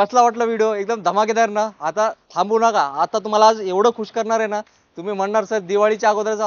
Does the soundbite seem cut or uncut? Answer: uncut